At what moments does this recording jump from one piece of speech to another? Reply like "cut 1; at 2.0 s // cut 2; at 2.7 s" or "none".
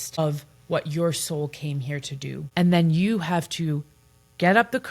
cut 1; at 2.4 s